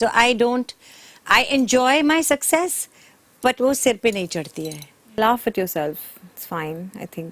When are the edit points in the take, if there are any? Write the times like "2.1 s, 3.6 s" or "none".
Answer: 5.2 s